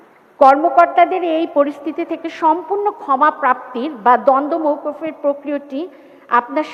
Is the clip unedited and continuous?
yes; 0 cuts

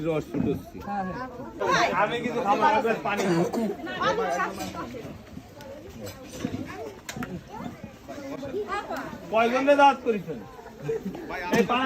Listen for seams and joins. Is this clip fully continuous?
no; 1 cut; at 1.6 s

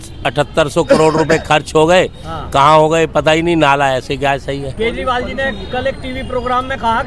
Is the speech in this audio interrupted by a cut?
no; 0 cuts

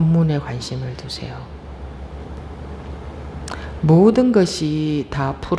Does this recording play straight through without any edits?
yes; 0 cuts

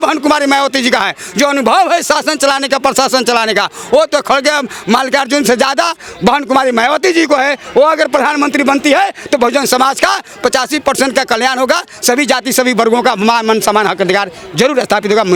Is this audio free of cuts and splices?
yes; 0 cuts

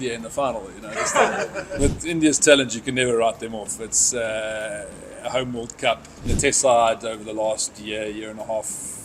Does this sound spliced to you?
yes; 2 cuts; at 1.8 s, 6.2 s

